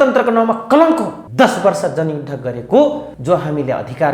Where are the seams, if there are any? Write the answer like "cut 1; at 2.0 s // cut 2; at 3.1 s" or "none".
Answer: cut 1; at 1.2 s // cut 2; at 3.1 s